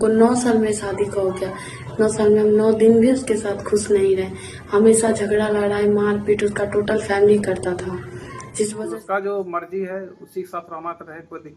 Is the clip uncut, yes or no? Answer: no